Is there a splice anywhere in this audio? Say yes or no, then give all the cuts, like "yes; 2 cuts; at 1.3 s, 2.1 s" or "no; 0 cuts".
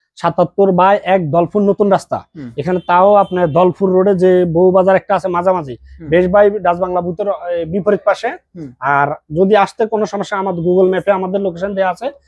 no; 0 cuts